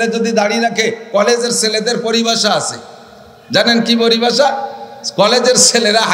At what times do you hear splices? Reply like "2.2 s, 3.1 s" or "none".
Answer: none